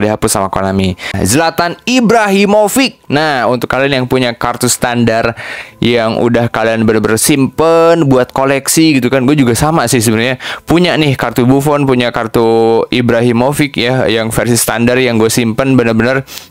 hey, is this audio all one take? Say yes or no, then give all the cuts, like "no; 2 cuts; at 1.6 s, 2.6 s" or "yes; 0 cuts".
no; 1 cut; at 1.1 s